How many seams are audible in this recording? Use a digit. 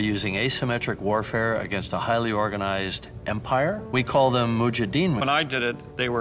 2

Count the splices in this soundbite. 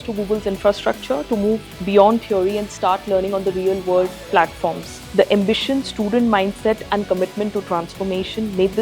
1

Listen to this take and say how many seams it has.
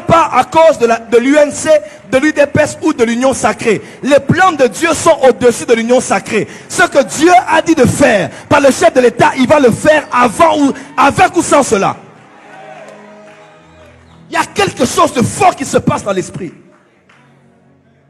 0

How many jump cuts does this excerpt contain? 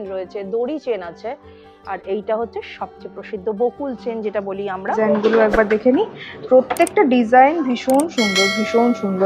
1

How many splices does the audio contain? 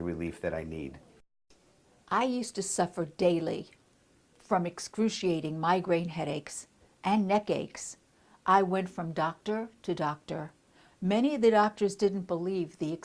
1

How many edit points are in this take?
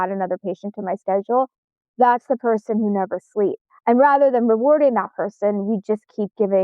1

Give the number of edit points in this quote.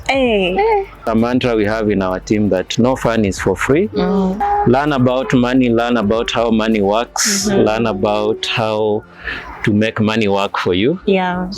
2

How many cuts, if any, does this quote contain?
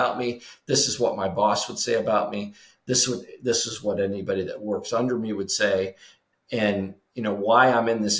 0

